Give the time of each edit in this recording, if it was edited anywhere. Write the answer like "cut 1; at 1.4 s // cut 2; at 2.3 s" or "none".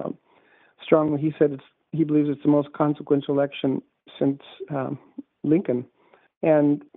none